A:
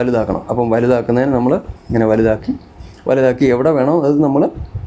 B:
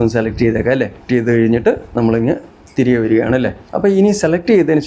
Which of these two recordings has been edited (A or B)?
B